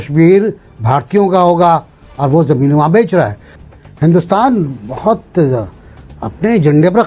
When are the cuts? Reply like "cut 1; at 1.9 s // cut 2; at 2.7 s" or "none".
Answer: cut 1; at 3.5 s